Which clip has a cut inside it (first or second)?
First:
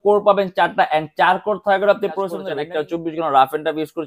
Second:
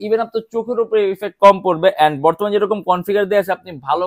first